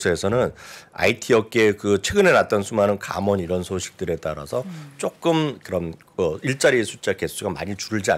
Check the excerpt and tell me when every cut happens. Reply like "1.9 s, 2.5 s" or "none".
none